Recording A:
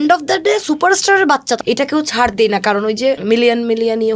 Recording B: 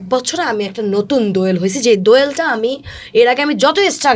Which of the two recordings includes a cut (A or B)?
A